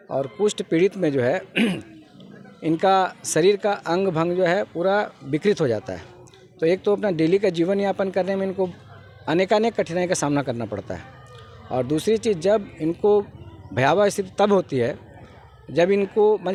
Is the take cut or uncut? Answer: uncut